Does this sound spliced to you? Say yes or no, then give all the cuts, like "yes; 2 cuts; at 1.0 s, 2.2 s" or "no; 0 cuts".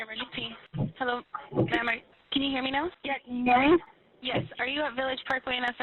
yes; 1 cut; at 0.9 s